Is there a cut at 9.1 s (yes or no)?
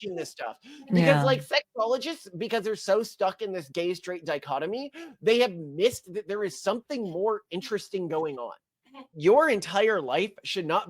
yes